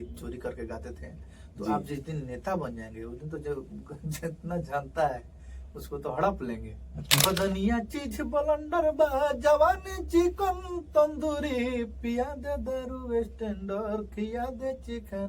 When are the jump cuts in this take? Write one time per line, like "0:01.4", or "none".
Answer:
0:07.2